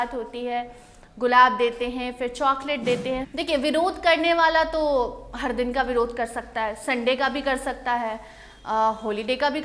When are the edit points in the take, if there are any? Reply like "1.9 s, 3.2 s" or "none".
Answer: 3.3 s

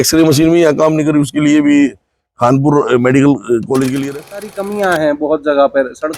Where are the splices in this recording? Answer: 4.3 s

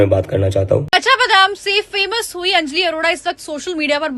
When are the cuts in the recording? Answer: 0.9 s

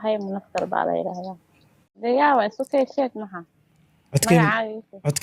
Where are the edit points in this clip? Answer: 2.0 s

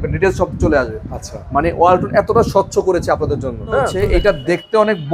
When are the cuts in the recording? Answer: 3.9 s

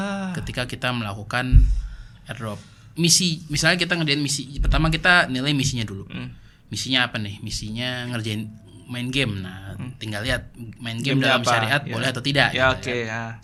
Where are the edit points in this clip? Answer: none

